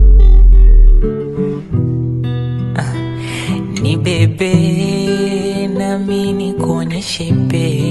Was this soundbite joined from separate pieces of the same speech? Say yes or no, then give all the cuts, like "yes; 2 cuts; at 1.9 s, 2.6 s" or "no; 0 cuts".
no; 0 cuts